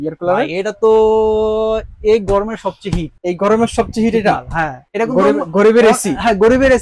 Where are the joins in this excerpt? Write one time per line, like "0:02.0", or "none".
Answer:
0:03.1
0:04.8